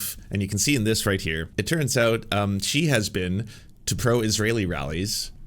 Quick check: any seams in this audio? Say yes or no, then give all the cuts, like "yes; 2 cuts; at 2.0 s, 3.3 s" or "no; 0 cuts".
yes; 1 cut; at 1.5 s